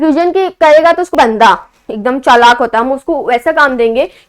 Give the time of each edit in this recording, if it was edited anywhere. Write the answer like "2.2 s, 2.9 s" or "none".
1.1 s